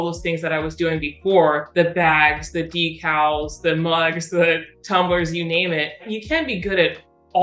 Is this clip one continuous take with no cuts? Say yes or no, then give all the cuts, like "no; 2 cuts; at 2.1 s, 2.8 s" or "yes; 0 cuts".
yes; 0 cuts